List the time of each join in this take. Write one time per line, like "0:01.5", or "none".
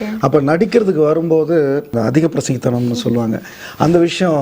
0:01.9